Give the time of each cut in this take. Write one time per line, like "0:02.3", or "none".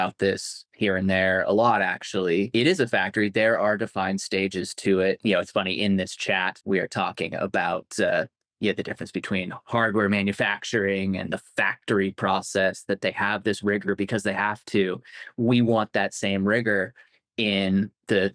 0:02.5
0:05.2
0:06.6